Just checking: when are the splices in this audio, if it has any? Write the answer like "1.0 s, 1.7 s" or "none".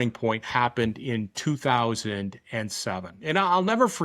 none